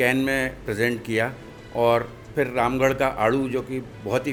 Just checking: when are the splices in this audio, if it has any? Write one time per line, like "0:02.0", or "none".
none

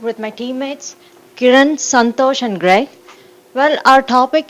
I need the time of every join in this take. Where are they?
none

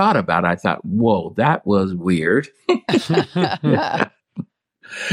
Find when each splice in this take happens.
0:04.2

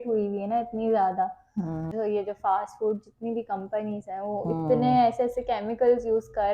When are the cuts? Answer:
none

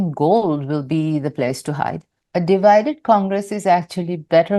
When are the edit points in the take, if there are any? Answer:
0:02.1

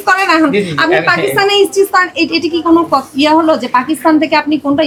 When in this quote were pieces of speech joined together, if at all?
none

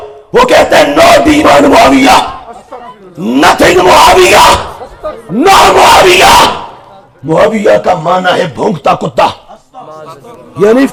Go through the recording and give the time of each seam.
none

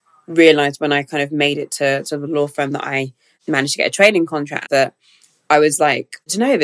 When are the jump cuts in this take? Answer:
none

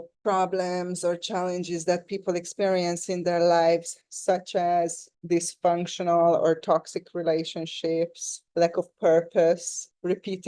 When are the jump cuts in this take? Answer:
0:05.1
0:08.4

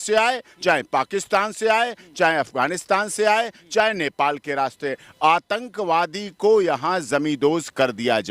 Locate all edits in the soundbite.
none

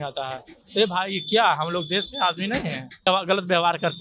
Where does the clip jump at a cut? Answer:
0:03.1

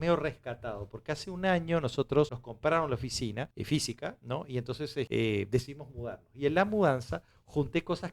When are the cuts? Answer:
0:02.4
0:03.6
0:05.1

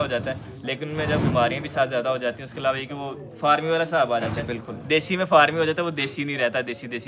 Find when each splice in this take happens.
none

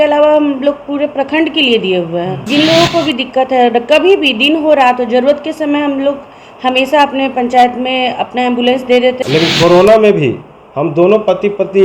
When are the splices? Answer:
0:02.4
0:09.2

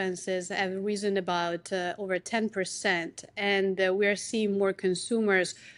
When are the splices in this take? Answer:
none

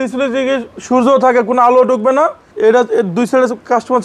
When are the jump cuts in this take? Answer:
0:02.4

